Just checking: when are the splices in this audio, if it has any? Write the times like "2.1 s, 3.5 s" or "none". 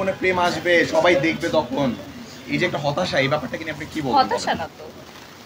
none